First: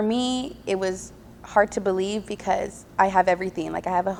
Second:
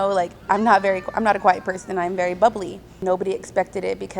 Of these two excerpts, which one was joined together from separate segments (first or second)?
second